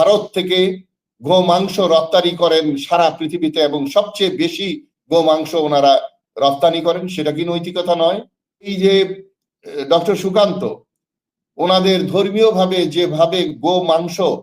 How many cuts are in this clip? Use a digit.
1